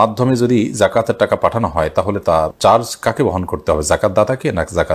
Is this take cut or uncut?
uncut